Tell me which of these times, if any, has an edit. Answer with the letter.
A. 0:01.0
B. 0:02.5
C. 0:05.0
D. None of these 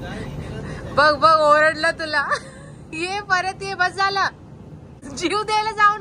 C